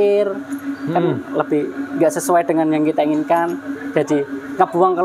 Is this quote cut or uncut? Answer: uncut